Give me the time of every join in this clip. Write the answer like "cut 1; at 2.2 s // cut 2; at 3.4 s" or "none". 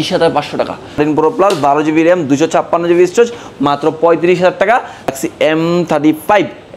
cut 1; at 0.9 s // cut 2; at 5.1 s